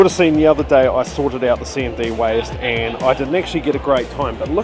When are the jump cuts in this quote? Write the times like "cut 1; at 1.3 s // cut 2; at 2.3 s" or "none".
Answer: none